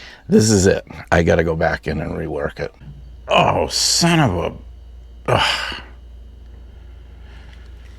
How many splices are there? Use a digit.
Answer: 1